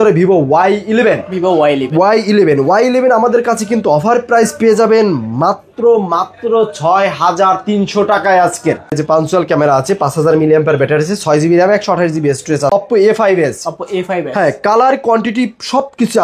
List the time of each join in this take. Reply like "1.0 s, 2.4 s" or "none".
8.9 s, 12.7 s